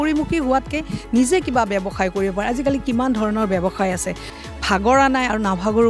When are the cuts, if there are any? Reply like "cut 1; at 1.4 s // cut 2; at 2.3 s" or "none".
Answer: cut 1; at 4.3 s